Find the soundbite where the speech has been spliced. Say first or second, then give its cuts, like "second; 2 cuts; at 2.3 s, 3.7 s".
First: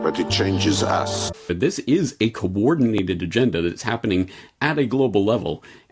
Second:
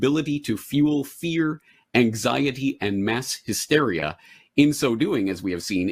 first; 1 cut; at 1.5 s